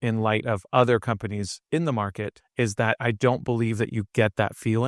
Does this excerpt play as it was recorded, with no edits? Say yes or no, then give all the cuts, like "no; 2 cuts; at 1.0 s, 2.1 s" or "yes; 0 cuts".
no; 1 cut; at 2.4 s